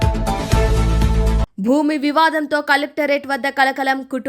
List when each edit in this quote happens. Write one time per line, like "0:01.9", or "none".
0:01.5